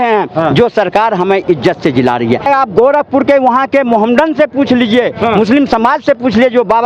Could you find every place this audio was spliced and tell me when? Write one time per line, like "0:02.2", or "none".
0:02.5